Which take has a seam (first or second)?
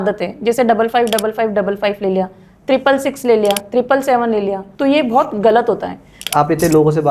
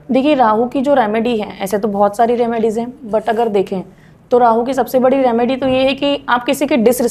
first